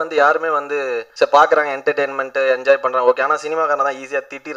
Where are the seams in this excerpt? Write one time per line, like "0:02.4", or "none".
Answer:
0:01.0